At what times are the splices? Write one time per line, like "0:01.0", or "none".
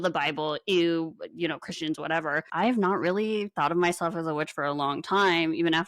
0:02.4